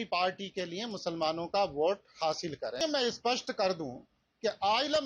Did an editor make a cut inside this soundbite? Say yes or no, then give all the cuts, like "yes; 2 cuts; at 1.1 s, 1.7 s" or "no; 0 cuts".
yes; 1 cut; at 2.8 s